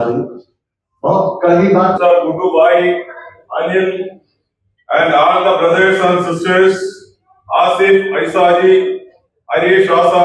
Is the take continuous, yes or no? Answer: no